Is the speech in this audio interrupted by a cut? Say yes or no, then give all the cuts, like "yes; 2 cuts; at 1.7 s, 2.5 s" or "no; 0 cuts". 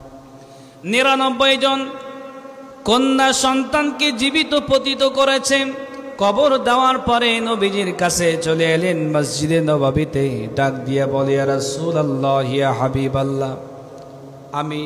no; 0 cuts